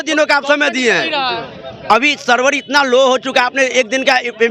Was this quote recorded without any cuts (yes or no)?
yes